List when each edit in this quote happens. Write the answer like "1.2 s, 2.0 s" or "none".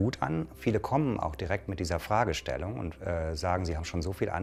none